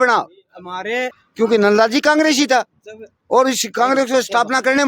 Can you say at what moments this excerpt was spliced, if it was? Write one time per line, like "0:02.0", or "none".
0:01.2